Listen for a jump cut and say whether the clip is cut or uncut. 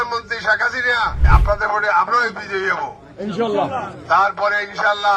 cut